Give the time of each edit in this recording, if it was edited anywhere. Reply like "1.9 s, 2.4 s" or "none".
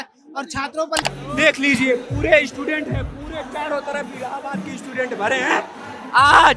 1.0 s